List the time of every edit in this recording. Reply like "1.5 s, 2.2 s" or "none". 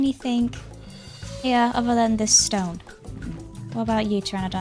none